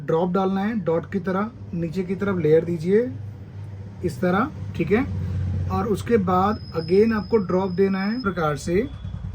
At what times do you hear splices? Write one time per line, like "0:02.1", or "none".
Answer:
0:08.2

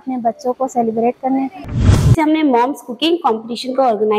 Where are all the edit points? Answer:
0:02.1

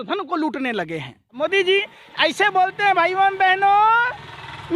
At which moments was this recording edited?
0:01.3

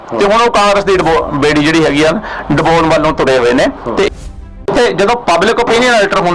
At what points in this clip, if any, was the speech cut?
0:04.1

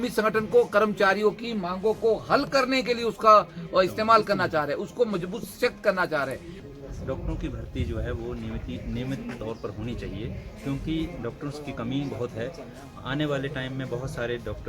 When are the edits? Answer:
0:06.5

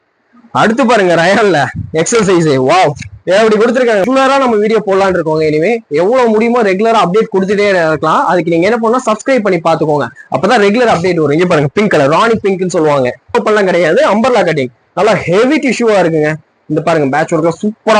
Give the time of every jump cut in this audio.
0:04.1
0:13.3

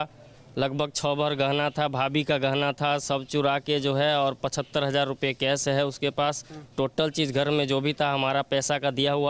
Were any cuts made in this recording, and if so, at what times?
none

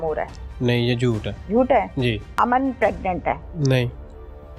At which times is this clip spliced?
0:01.3
0:02.3
0:03.5

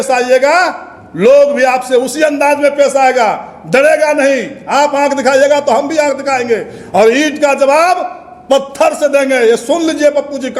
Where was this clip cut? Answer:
none

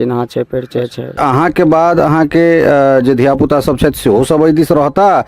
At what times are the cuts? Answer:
0:01.2

